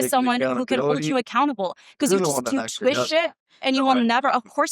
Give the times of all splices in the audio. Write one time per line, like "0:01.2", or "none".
0:03.6